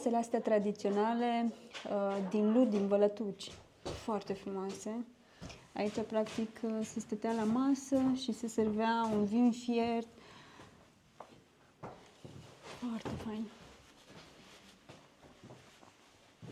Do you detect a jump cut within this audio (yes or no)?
no